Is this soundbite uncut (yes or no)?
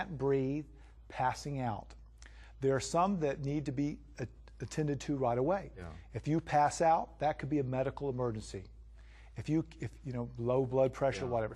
yes